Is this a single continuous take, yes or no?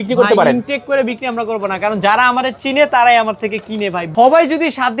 no